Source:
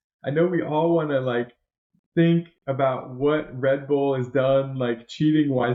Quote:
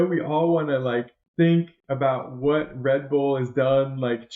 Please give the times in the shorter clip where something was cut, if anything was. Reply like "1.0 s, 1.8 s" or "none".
1.2 s